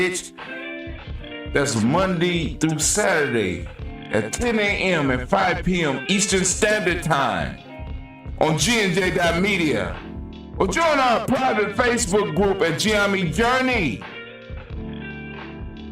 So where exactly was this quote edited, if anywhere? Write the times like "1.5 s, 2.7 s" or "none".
13.2 s

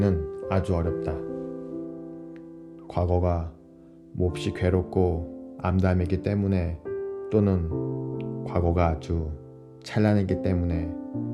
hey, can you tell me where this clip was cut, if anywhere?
none

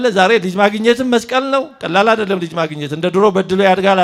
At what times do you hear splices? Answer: none

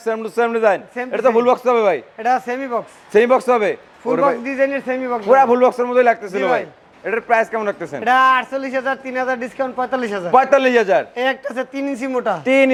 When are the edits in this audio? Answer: none

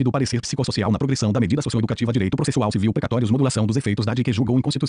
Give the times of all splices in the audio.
2.2 s

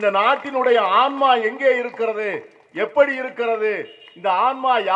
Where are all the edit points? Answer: none

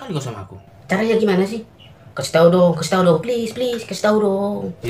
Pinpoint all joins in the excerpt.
none

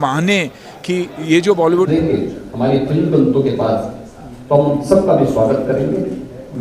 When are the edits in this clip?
1.9 s

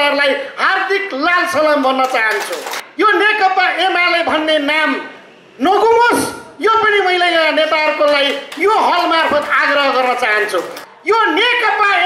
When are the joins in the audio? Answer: 2.8 s, 10.8 s

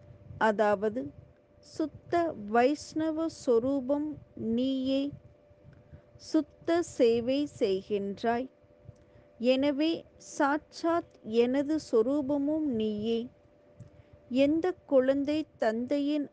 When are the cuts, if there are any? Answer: 8.4 s

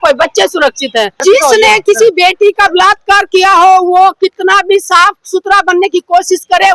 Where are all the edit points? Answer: 1.2 s

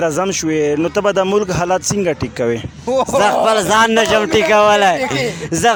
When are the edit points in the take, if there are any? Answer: none

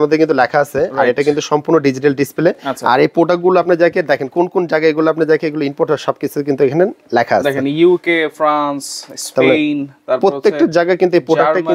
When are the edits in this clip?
none

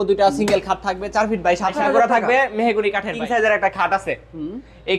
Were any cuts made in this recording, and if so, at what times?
1.4 s, 3.2 s

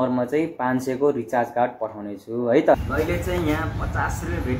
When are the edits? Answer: 2.8 s

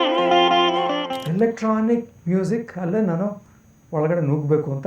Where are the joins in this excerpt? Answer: 1.0 s

